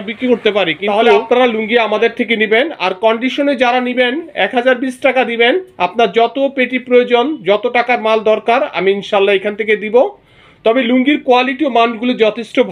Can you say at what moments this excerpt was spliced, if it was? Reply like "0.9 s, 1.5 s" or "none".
1.2 s